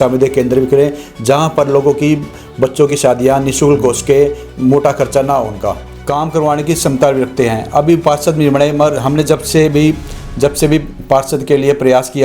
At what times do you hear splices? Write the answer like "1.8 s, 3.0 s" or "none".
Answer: 5.9 s